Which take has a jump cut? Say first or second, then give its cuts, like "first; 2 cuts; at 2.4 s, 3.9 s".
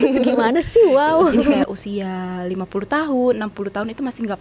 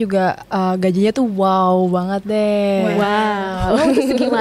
first; 1 cut; at 1.6 s